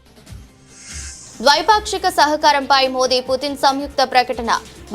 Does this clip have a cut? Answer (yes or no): yes